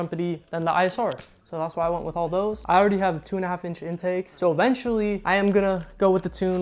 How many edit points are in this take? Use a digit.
3